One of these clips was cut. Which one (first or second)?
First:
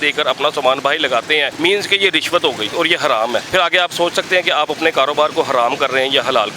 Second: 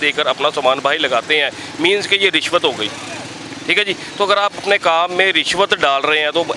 first